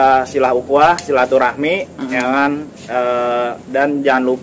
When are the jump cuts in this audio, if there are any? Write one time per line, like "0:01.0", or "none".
none